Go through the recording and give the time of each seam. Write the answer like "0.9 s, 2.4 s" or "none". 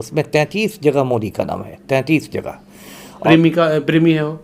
3.2 s